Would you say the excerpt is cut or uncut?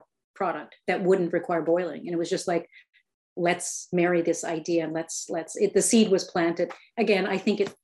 uncut